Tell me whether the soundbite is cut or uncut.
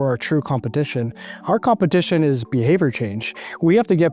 uncut